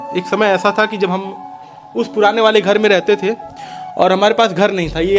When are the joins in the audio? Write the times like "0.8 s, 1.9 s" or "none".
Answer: none